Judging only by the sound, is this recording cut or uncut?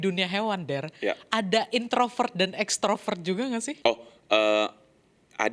cut